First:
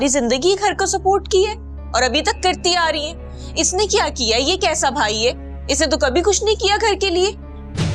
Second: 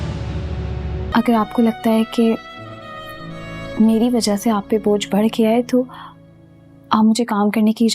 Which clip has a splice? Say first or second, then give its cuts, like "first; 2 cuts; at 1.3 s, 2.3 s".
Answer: second; 1 cut; at 1.1 s